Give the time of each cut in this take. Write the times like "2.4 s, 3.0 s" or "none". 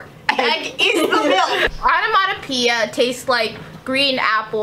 1.7 s